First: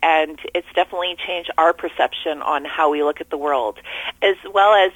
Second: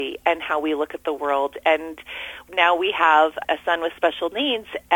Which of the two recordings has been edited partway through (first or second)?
second